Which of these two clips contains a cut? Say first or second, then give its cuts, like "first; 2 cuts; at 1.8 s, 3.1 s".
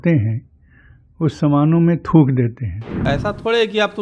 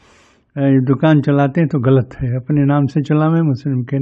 first; 1 cut; at 3.0 s